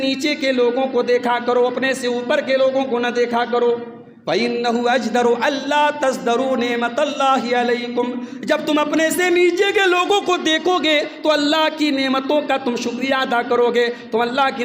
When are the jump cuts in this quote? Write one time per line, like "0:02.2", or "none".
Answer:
none